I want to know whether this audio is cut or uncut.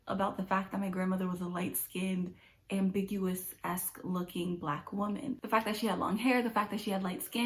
uncut